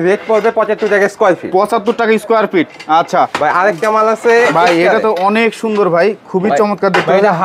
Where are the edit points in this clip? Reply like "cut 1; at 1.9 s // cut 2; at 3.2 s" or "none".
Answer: none